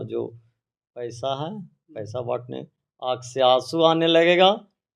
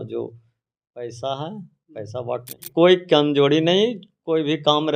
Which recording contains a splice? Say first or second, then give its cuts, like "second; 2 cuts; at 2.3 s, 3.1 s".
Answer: second; 1 cut; at 2.7 s